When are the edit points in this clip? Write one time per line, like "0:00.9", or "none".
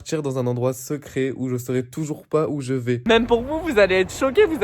0:03.0